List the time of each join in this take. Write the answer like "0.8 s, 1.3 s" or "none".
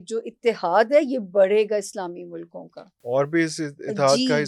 none